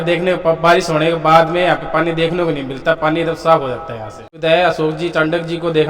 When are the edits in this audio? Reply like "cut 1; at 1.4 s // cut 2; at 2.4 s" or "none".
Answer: cut 1; at 4.4 s